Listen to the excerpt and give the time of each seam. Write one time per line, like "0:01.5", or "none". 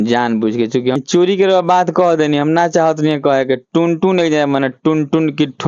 0:01.0

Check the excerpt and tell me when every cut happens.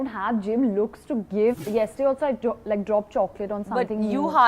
0:01.6

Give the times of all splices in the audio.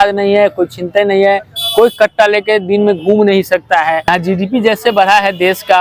0:04.1

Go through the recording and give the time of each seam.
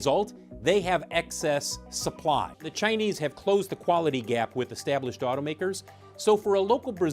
0:02.6

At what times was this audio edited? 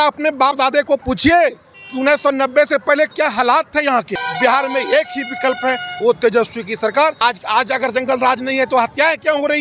0:04.2
0:07.2

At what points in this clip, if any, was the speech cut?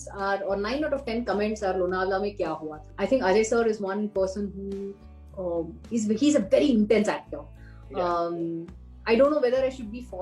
0:02.9

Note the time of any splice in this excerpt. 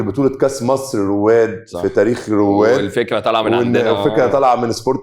none

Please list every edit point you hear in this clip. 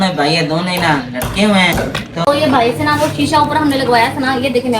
0:02.2

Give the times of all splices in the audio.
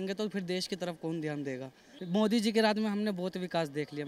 0:01.9

